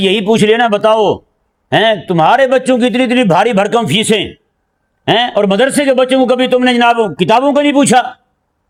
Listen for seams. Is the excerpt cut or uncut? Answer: uncut